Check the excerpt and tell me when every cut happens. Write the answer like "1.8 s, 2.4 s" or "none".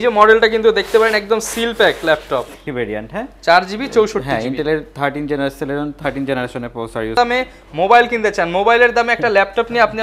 2.6 s, 7.2 s